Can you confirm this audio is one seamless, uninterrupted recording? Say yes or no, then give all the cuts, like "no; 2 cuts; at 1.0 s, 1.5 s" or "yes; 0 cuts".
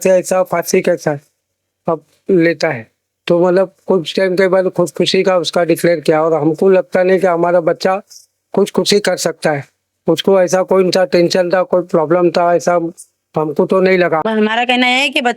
no; 1 cut; at 14.2 s